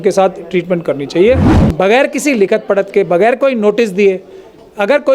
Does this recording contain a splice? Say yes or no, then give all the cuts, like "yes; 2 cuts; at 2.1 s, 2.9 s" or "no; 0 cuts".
yes; 1 cut; at 1.5 s